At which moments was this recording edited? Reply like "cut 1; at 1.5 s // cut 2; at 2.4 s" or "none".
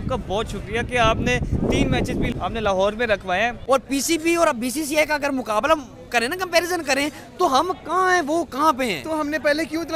cut 1; at 2.3 s // cut 2; at 3.6 s